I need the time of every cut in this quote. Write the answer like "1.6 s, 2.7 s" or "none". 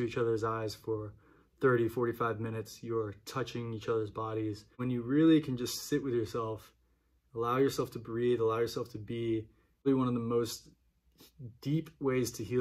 4.8 s, 9.8 s